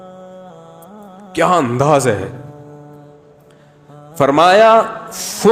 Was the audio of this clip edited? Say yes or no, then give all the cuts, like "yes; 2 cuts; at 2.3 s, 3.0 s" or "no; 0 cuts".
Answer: yes; 3 cuts; at 1.3 s, 2.4 s, 4.2 s